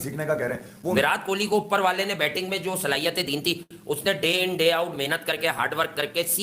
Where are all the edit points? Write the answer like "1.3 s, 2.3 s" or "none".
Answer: 0.9 s